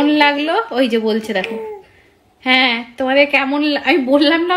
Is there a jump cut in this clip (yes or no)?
no